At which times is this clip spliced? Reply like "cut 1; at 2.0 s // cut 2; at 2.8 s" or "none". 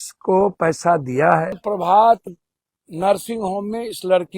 cut 1; at 1.6 s